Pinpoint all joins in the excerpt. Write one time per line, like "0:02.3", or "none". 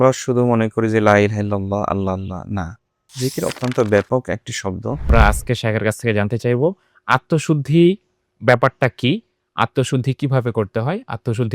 0:05.1

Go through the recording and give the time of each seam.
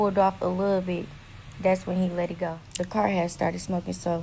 0:02.6

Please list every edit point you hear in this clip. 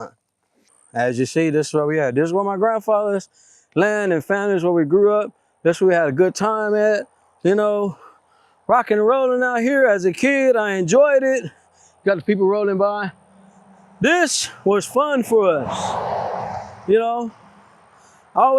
0:04.4

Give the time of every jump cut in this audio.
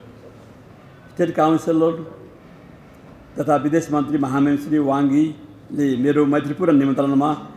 none

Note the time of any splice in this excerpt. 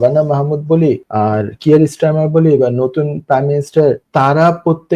0:01.1
0:04.0

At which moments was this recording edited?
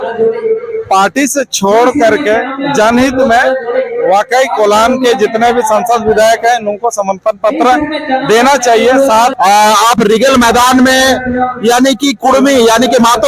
0:09.3

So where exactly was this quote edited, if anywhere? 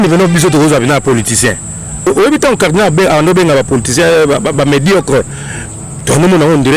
0:02.1

